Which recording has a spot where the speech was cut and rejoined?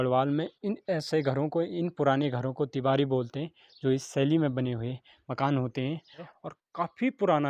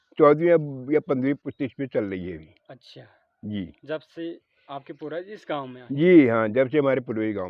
first; 1 cut; at 6.3 s

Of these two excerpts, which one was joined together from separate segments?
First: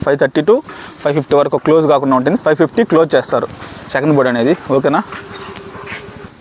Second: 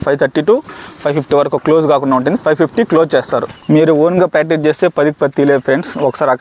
second; 1 cut; at 3.5 s

